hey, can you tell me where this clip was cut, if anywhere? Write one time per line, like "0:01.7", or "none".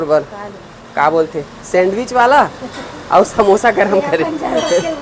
none